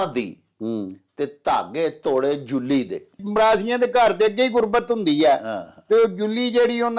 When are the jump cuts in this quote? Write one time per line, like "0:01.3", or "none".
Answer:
0:03.2